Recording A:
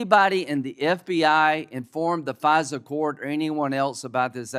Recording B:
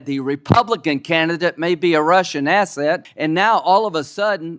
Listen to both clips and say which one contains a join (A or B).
B